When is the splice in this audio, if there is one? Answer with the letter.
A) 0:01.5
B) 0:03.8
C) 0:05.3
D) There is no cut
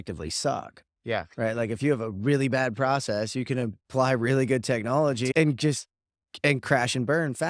C